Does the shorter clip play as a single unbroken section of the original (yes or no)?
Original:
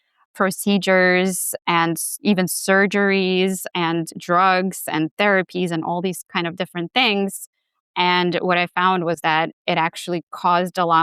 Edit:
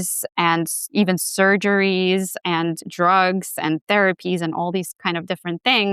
yes